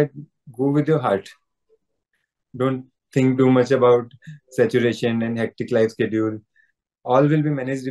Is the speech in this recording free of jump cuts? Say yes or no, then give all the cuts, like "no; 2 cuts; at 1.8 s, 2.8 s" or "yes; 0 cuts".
yes; 0 cuts